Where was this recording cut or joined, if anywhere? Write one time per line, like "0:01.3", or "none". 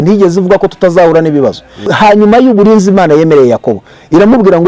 0:01.9